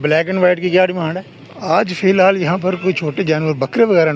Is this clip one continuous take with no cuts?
no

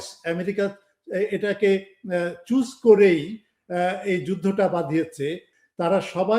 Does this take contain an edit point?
yes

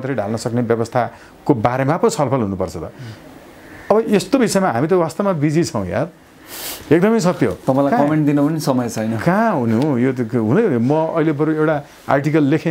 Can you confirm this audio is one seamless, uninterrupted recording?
yes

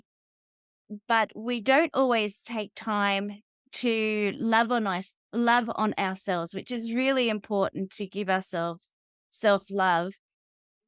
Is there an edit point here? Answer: no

